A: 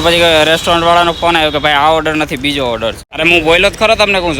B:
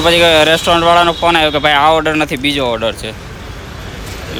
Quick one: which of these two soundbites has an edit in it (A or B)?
A